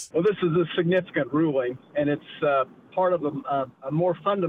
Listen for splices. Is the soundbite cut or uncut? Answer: uncut